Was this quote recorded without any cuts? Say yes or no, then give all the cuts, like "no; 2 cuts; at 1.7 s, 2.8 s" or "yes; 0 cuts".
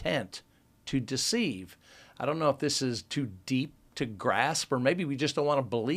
yes; 0 cuts